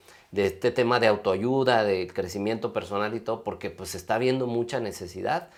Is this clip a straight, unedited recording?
yes; 0 cuts

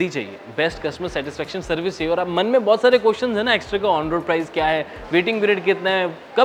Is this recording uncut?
yes; 0 cuts

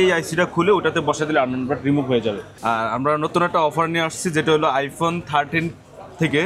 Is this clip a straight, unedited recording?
no; 1 cut; at 2.5 s

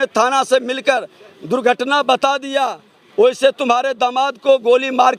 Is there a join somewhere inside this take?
no; 0 cuts

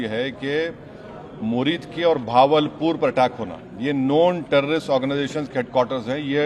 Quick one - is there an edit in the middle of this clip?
no; 0 cuts

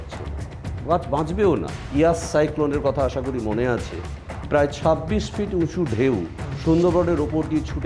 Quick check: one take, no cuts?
no; 1 cut; at 1.8 s

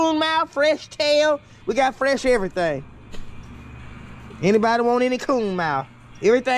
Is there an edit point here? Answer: no; 0 cuts

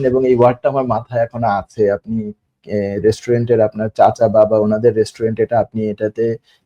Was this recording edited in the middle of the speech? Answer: no; 0 cuts

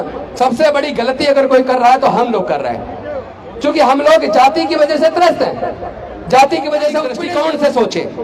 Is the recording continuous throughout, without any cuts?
no; 1 cut; at 7.2 s

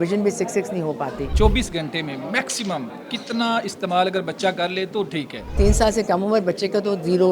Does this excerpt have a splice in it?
yes; 2 cuts; at 1.2 s, 5.6 s

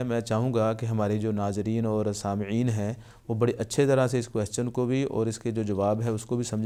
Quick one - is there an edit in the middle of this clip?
no; 0 cuts

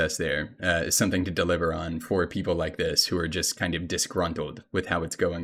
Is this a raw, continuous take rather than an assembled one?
yes; 0 cuts

